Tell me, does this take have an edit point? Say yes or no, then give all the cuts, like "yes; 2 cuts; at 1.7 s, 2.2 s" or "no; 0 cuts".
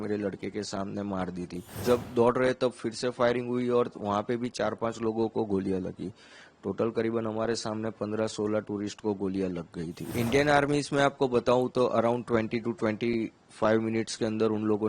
yes; 2 cuts; at 1.7 s, 10.1 s